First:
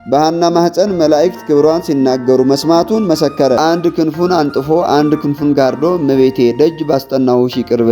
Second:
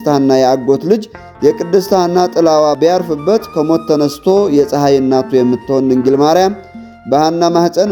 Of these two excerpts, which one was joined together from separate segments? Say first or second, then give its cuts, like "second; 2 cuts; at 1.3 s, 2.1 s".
first; 1 cut; at 3.6 s